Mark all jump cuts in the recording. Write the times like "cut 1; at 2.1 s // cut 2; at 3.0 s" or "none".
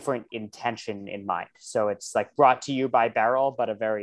none